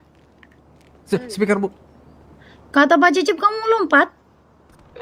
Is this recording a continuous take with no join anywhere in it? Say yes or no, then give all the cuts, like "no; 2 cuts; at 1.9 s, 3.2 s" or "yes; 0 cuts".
yes; 0 cuts